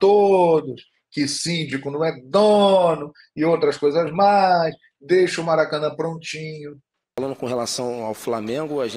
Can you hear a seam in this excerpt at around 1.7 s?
no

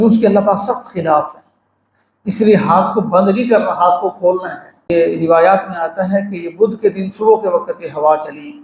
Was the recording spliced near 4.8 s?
yes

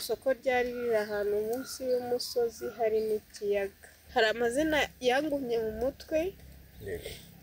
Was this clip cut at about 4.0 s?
yes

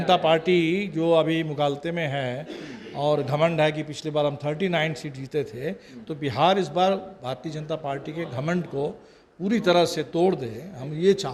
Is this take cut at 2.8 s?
no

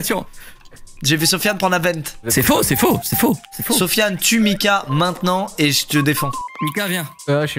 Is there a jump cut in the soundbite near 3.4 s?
no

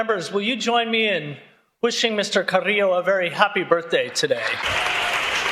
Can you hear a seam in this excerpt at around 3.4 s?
no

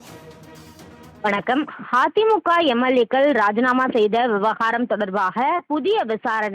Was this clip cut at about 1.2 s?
yes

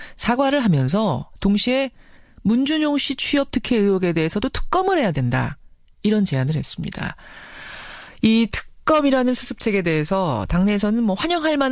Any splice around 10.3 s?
yes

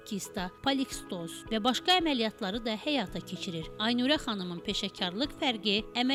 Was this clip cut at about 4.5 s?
no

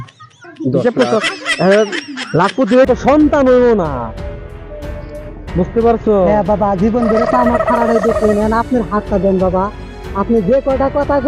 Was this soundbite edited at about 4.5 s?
no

